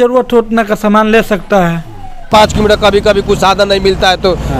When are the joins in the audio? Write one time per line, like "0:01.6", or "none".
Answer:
0:02.3